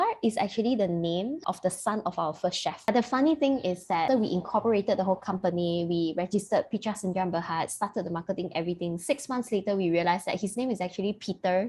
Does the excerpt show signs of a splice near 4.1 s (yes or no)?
yes